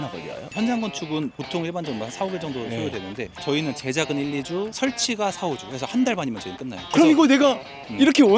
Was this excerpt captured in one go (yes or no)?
yes